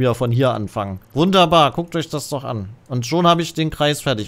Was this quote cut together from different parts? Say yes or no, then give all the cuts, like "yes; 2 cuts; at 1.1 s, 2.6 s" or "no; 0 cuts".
yes; 1 cut; at 1.0 s